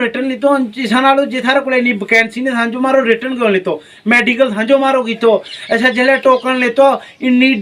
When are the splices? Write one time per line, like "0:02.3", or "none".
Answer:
none